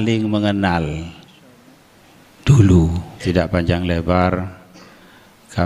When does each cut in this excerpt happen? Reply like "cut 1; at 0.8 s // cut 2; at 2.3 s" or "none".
cut 1; at 3.1 s